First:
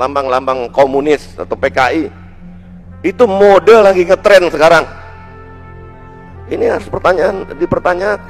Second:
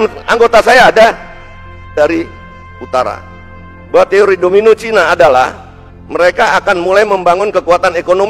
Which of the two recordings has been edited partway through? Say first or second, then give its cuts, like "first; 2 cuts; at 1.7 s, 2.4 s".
second; 1 cut; at 1.9 s